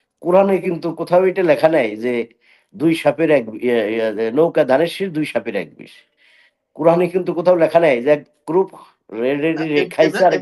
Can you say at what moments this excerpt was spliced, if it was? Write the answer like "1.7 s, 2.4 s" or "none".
none